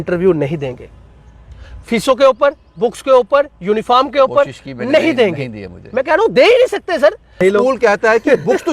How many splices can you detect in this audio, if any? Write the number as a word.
one